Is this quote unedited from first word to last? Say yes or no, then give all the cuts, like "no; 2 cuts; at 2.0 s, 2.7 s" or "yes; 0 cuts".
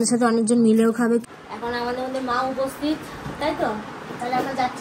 no; 1 cut; at 1.2 s